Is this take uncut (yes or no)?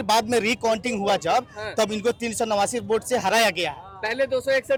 yes